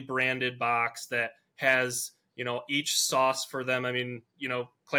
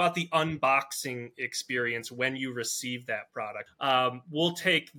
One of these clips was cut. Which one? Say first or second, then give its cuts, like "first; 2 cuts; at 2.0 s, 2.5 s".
second; 1 cut; at 3.6 s